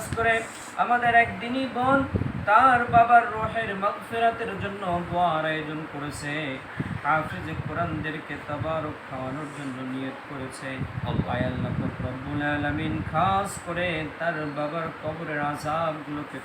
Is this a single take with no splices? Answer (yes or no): yes